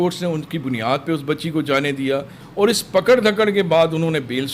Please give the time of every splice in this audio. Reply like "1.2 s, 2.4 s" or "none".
2.4 s